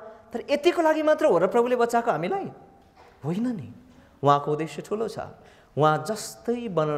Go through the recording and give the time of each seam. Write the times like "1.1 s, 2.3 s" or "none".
none